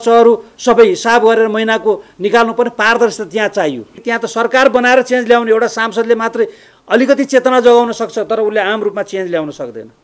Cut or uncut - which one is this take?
cut